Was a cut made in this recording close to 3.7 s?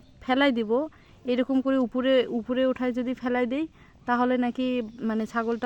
no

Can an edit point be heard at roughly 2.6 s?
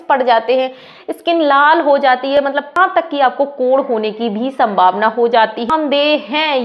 yes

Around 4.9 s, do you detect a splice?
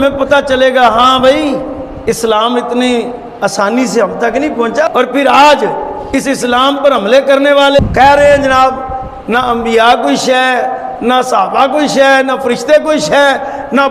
yes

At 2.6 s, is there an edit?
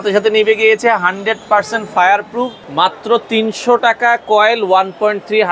yes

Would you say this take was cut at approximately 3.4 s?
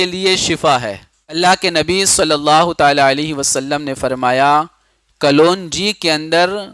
no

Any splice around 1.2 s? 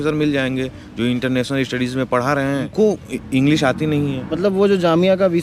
no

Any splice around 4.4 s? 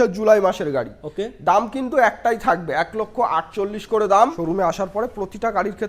yes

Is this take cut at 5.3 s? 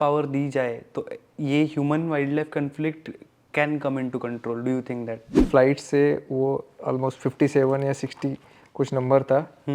yes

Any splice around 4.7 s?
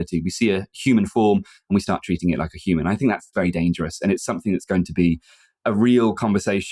no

